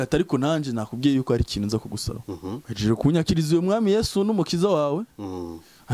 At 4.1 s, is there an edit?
no; 1 cut; at 2.7 s

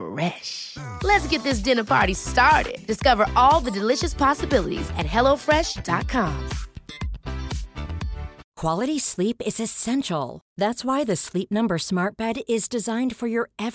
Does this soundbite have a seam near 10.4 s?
no; 1 cut; at 8.4 s

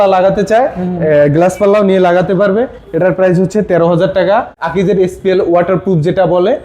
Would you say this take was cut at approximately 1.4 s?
no; 1 cut; at 4.6 s

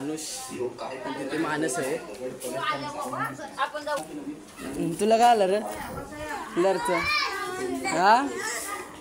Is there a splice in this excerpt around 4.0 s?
yes; 1 cut; at 4.0 s

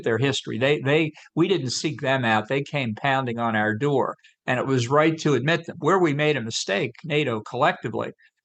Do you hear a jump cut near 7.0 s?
no; 0 cuts

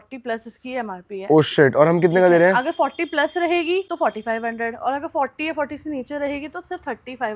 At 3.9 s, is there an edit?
yes; 1 cut; at 3.9 s

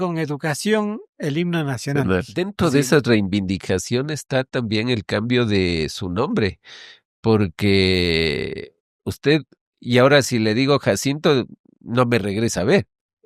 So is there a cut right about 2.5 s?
yes; 1 cut; at 2.5 s

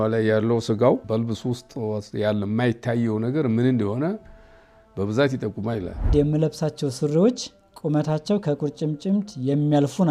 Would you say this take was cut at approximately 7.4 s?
no; 2 cuts; at 1.0 s, 6.1 s

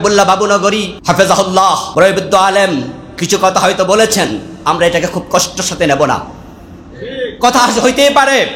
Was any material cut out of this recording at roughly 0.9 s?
yes; 2 cuts; at 0.9 s, 1.9 s

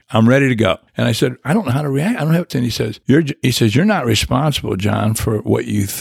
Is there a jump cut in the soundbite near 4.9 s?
no; 2 cuts; at 0.9 s, 2.6 s

